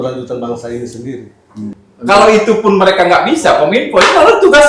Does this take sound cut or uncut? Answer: cut